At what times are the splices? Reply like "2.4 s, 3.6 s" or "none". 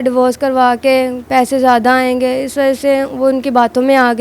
none

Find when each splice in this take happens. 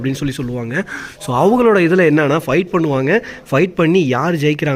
none

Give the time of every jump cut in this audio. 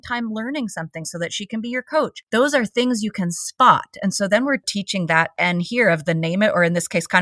2.2 s, 4.7 s

